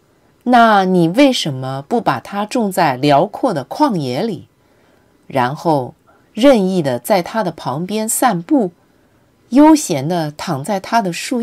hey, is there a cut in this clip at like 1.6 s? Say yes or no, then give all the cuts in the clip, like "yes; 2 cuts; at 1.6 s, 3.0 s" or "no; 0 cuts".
yes; 1 cut; at 1.6 s